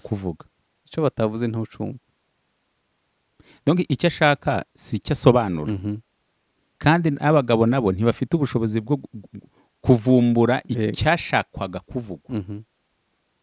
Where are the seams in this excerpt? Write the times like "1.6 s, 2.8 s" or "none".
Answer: none

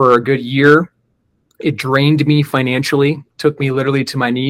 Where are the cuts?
3.3 s

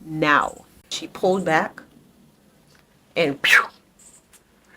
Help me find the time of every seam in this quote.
1.0 s

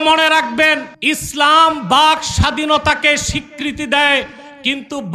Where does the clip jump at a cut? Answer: 0.9 s

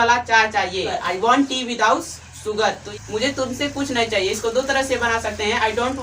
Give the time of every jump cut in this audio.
1.0 s, 2.9 s

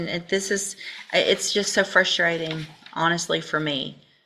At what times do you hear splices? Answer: none

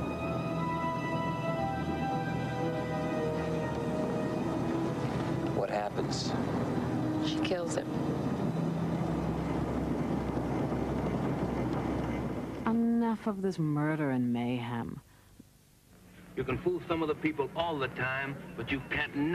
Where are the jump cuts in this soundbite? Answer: 3.6 s

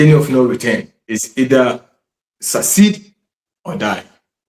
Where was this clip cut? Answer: 1.0 s

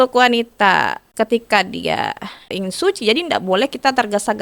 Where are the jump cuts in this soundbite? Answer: 1.0 s, 2.5 s

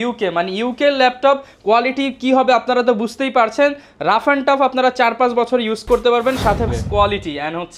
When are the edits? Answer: 6.7 s

